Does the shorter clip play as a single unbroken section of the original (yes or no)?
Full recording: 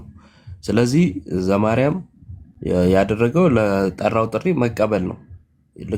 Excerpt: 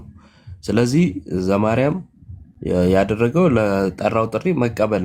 yes